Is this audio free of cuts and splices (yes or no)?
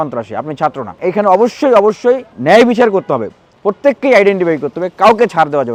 yes